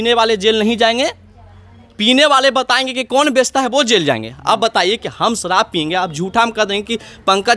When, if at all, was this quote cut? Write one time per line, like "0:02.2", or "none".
none